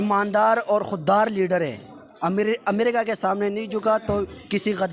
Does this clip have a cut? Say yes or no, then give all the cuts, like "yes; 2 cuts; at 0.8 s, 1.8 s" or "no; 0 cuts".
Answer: no; 0 cuts